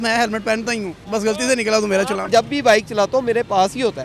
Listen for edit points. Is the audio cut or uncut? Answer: cut